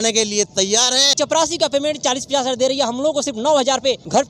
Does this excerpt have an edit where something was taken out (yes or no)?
yes